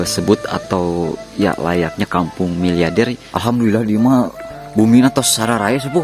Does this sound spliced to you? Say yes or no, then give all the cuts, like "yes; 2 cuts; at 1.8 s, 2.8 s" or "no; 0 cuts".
yes; 1 cut; at 3.2 s